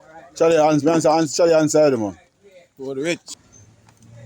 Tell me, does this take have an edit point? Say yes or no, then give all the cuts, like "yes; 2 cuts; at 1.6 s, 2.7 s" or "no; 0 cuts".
yes; 1 cut; at 3.3 s